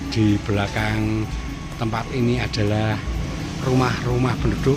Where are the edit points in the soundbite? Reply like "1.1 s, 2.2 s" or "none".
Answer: none

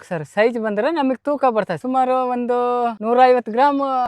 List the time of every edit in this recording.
none

